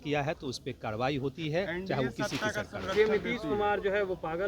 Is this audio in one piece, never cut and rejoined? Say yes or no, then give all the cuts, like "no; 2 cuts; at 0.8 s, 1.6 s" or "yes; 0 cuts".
yes; 0 cuts